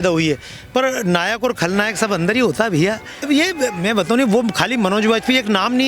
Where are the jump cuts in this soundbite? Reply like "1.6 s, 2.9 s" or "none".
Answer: 3.1 s